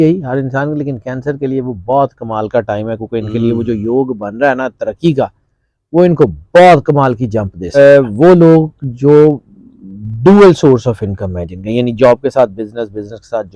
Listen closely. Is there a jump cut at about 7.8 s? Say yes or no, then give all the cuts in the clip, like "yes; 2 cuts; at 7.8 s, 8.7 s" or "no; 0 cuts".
yes; 1 cut; at 7.8 s